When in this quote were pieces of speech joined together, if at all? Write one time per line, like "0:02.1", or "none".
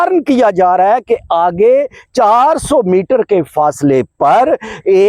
none